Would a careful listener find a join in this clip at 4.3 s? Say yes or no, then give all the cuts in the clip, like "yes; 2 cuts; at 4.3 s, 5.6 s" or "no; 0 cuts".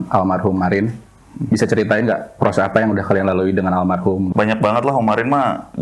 yes; 1 cut; at 4.3 s